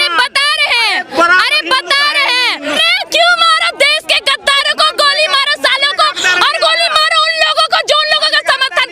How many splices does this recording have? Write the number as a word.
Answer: one